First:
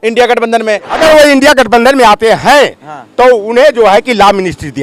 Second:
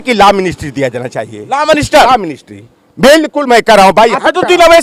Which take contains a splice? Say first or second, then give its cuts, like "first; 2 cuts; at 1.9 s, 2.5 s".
first; 1 cut; at 0.9 s